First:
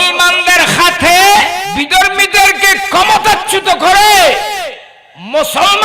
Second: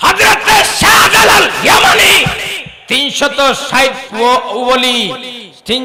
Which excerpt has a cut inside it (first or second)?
first